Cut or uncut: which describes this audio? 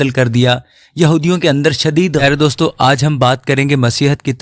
cut